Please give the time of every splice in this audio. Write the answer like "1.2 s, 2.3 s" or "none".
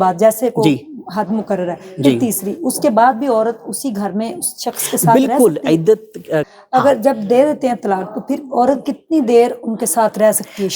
6.5 s